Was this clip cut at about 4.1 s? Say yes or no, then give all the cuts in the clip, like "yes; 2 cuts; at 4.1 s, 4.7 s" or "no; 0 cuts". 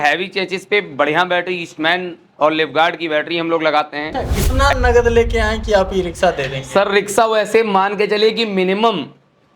yes; 1 cut; at 4.1 s